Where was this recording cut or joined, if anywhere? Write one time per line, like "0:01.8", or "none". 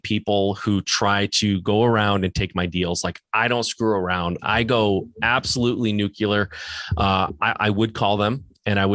none